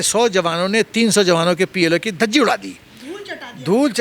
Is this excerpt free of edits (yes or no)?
yes